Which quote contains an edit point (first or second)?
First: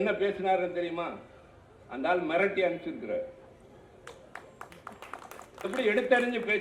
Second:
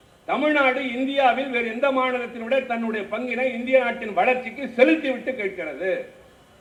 first